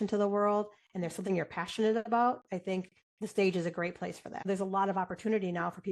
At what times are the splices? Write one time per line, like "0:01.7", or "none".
0:04.5